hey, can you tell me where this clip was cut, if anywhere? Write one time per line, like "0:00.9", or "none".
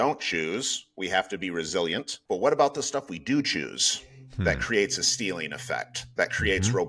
0:02.1